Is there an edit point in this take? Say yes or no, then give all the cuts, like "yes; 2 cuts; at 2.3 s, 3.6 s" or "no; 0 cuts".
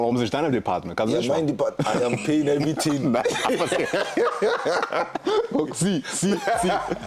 no; 0 cuts